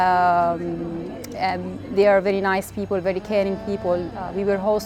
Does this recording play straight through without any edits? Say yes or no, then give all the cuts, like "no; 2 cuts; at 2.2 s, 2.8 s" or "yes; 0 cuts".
yes; 0 cuts